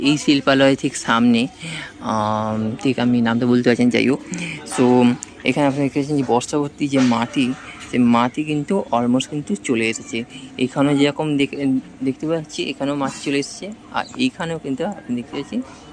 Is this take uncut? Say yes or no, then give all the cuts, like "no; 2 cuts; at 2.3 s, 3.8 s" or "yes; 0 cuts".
yes; 0 cuts